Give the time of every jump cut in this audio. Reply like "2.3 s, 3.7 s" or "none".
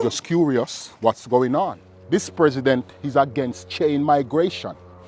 1.9 s